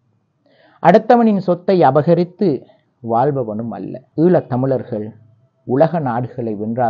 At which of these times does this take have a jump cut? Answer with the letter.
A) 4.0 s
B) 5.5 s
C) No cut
A